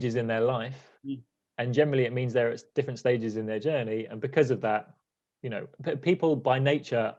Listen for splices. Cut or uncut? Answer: uncut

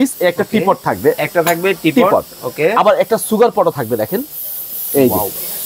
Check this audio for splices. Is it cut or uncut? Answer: uncut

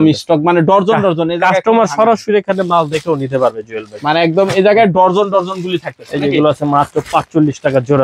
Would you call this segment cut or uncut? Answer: uncut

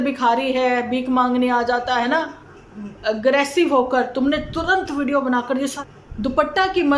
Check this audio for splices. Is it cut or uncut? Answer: cut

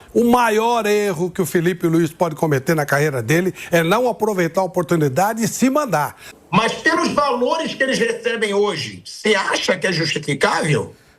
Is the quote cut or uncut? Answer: cut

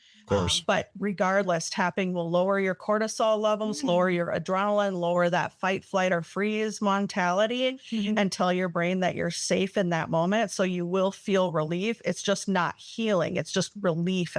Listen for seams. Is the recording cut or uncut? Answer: uncut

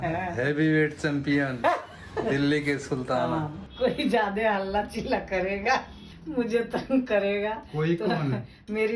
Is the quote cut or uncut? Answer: cut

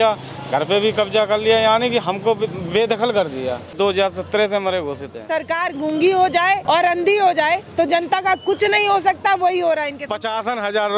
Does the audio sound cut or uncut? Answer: cut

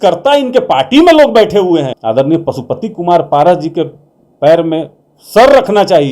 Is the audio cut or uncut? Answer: cut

